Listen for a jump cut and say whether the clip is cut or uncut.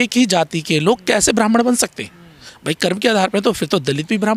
uncut